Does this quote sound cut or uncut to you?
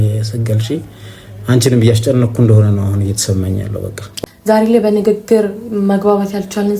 cut